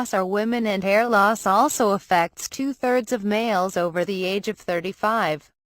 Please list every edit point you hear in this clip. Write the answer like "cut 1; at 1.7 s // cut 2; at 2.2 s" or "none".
cut 1; at 3.1 s